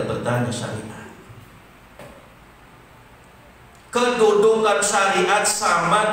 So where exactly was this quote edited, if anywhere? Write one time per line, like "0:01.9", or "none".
0:02.0